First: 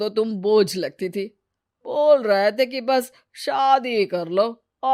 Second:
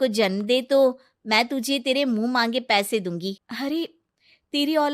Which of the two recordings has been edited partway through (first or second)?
second